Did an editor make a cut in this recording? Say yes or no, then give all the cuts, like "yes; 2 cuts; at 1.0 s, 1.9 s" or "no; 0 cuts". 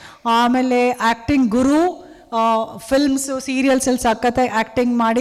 no; 0 cuts